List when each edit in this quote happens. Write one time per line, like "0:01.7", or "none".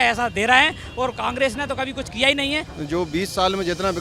0:02.7